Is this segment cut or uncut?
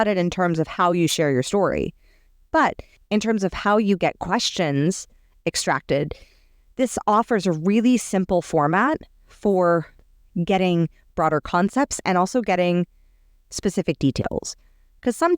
cut